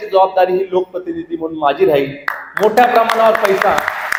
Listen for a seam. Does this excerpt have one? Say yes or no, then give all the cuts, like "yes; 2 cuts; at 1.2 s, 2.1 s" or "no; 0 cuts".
no; 0 cuts